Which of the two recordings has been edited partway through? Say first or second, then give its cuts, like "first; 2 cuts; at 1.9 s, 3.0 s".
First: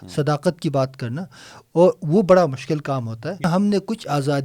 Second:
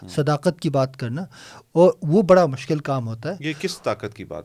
first; 1 cut; at 3.5 s